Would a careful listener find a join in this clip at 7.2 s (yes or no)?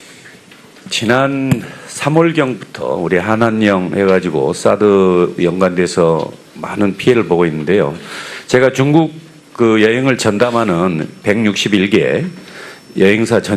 yes